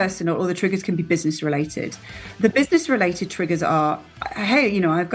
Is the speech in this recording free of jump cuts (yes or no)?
yes